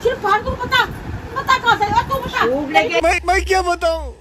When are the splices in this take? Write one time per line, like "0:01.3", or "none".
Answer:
none